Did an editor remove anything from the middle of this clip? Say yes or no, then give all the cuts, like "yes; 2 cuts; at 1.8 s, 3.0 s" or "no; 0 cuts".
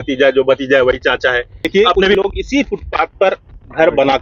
yes; 1 cut; at 1.7 s